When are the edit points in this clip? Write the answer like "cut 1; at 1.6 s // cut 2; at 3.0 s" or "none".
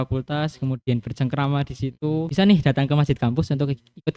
cut 1; at 2.3 s

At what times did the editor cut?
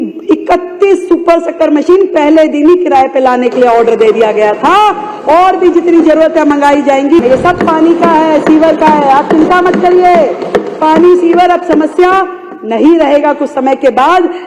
cut 1; at 7.2 s

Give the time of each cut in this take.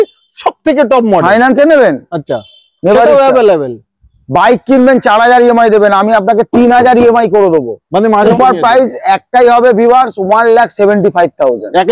cut 1; at 8.3 s

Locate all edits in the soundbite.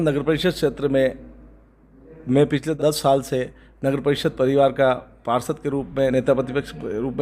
cut 1; at 2.7 s

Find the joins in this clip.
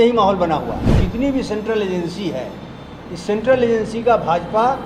cut 1; at 1.0 s

